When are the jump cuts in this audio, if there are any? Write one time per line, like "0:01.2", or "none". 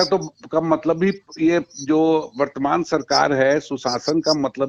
none